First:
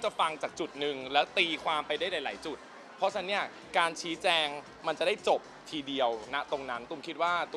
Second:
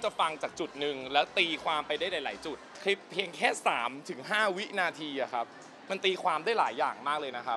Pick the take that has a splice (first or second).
second